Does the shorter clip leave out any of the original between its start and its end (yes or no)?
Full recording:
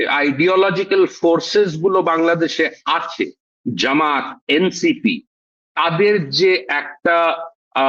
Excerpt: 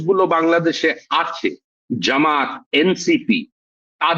no